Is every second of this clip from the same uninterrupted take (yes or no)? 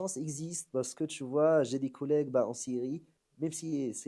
yes